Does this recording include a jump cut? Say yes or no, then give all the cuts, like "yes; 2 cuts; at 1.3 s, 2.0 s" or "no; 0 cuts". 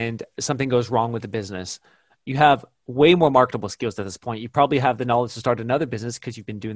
no; 0 cuts